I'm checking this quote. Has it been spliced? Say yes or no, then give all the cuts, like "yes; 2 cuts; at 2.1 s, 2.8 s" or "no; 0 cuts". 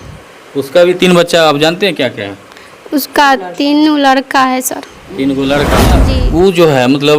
yes; 1 cut; at 6.0 s